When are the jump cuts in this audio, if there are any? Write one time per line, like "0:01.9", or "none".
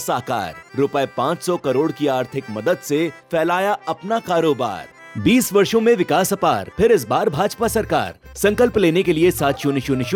none